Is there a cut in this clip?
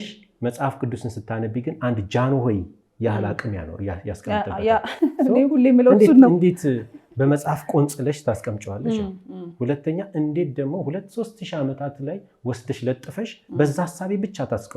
no; 0 cuts

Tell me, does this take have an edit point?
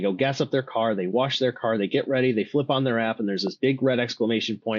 no; 0 cuts

